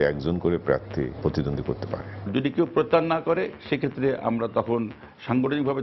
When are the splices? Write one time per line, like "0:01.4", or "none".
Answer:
0:02.1

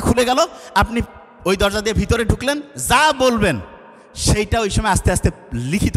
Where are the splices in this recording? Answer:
none

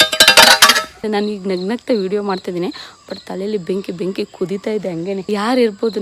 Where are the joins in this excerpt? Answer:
0:00.9
0:05.3

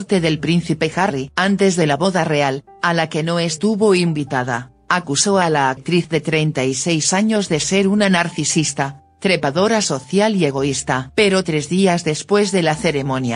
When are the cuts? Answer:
0:05.4

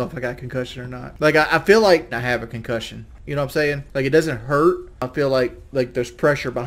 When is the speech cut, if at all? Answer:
0:01.1
0:05.0

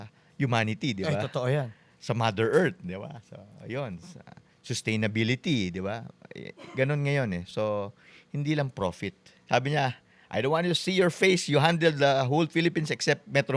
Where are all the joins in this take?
0:09.3

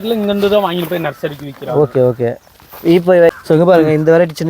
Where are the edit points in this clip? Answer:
0:03.3

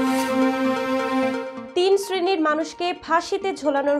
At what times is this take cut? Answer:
0:01.5

